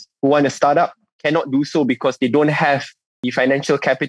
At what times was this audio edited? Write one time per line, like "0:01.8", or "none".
0:03.2